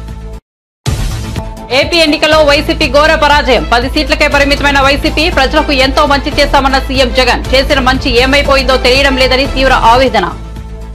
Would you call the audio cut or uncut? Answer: cut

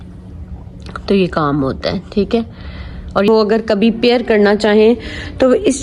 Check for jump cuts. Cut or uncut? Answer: cut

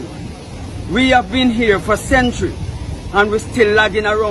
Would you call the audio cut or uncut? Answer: uncut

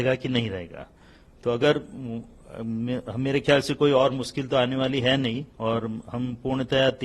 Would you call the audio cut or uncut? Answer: uncut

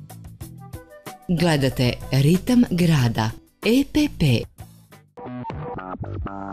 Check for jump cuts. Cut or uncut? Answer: cut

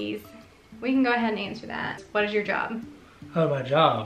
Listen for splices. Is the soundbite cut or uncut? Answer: cut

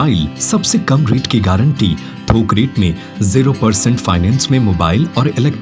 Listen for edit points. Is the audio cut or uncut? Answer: uncut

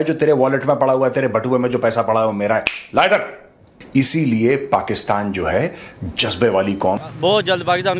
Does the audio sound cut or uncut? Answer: cut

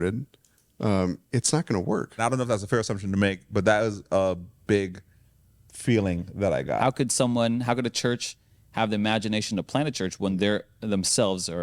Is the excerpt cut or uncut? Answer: cut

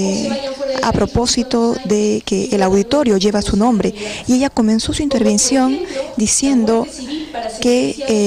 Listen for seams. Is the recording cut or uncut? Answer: uncut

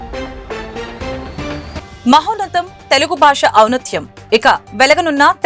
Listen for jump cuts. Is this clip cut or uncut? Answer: cut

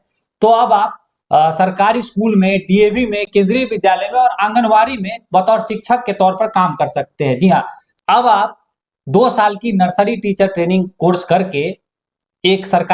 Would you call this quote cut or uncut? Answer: uncut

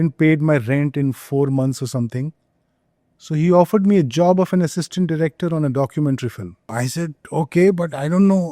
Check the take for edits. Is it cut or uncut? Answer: cut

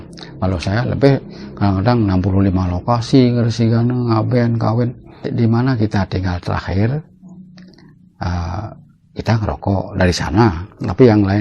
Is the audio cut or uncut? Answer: cut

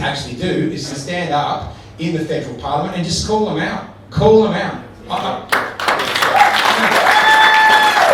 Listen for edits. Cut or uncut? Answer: cut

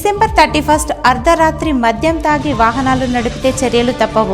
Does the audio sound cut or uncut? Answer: uncut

